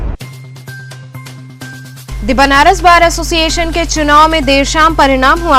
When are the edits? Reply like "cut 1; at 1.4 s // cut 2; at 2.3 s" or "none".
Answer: cut 1; at 1.9 s